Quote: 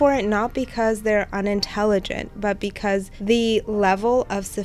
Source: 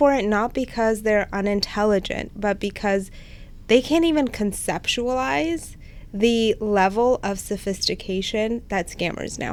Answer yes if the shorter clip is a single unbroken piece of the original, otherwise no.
no